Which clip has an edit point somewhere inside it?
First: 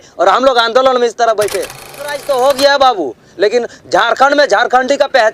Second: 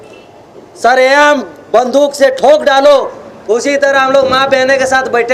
first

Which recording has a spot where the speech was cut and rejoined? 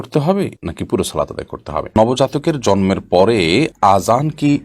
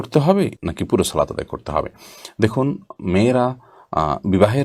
first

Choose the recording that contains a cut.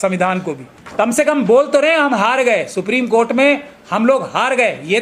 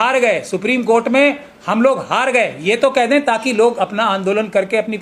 first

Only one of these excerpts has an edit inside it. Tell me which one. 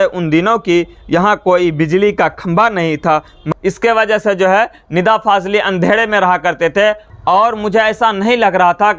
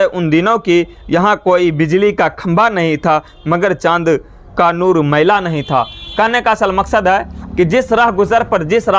first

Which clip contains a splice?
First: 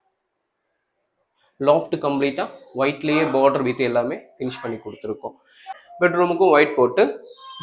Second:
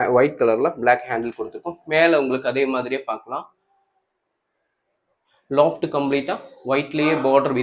first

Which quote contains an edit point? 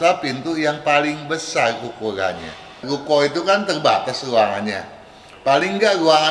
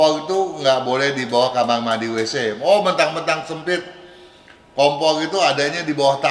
first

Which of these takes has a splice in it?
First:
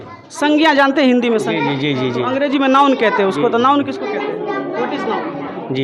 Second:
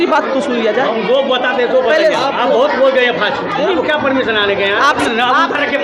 second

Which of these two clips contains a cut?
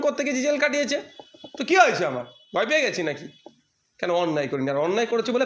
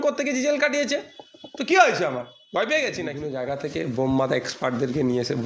second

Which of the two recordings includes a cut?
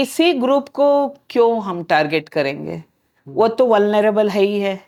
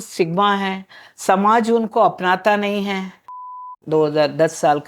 second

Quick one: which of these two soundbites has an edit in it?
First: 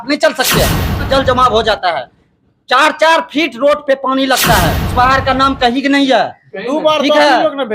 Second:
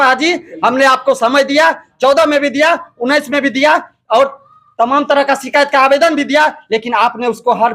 first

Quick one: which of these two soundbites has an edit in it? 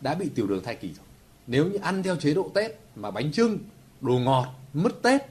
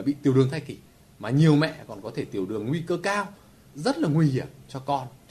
second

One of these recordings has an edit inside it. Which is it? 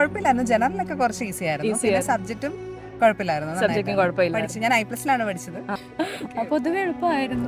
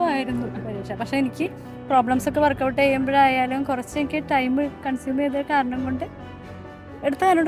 first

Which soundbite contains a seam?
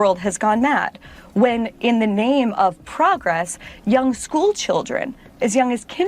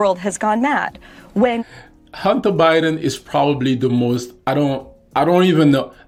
first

